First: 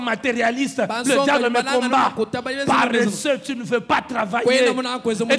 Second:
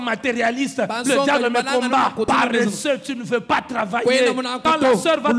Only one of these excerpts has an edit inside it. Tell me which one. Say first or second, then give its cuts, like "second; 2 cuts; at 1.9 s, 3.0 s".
second; 2 cuts; at 2.3 s, 4.6 s